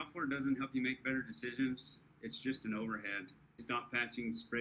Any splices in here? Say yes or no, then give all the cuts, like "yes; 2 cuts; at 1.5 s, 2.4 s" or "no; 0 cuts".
yes; 1 cut; at 3.6 s